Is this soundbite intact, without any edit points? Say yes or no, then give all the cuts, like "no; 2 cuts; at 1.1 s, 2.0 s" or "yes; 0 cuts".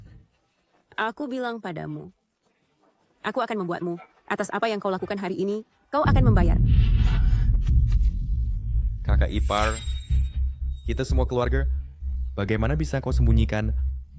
yes; 0 cuts